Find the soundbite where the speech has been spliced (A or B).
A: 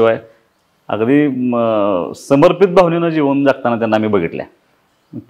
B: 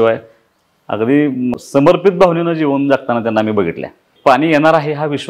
B